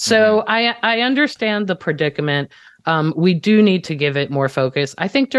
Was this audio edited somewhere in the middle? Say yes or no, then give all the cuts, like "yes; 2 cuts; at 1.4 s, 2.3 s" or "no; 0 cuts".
no; 0 cuts